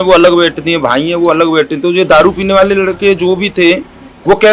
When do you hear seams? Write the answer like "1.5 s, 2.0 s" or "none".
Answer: none